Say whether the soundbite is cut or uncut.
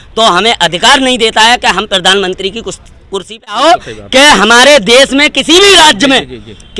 cut